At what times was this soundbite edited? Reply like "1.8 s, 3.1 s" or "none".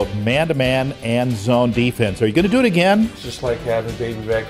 3.2 s

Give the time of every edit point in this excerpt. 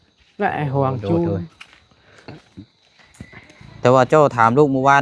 3.6 s

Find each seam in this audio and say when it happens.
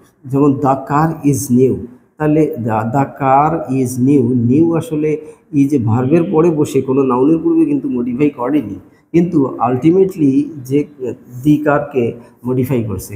none

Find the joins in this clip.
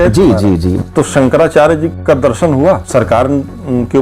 0.8 s, 1.9 s, 2.8 s

